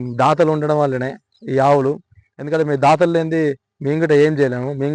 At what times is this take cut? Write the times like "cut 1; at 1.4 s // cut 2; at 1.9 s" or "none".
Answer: none